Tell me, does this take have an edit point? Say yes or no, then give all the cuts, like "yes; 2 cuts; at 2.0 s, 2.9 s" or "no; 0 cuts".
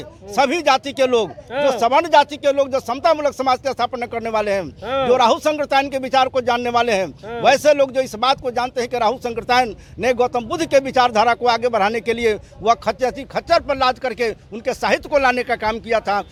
no; 0 cuts